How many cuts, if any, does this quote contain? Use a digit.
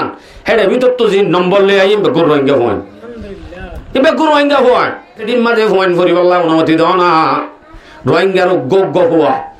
1